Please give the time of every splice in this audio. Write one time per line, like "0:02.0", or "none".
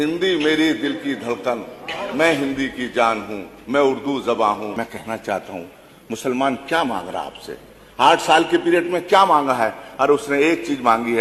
0:04.7